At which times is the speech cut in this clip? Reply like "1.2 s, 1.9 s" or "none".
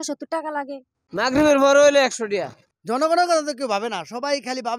1.0 s, 2.5 s